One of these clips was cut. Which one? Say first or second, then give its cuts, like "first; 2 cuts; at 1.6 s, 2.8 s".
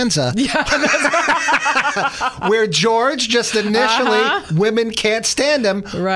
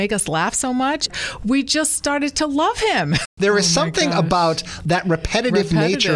second; 2 cuts; at 1.1 s, 3.2 s